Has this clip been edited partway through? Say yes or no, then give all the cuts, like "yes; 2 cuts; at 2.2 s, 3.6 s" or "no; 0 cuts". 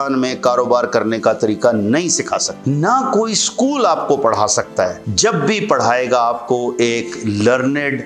yes; 2 cuts; at 2.5 s, 5.0 s